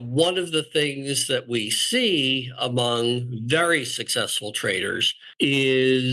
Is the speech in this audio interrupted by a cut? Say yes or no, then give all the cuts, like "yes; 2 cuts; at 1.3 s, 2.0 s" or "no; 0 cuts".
yes; 1 cut; at 5.2 s